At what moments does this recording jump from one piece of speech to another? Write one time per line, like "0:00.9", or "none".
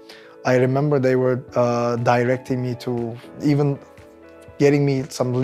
none